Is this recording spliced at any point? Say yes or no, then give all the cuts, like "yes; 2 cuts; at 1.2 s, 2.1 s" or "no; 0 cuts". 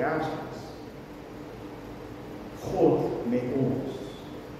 no; 0 cuts